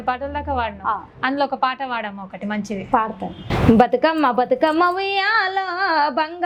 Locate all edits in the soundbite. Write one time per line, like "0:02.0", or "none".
none